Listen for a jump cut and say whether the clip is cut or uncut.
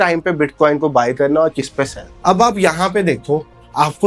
uncut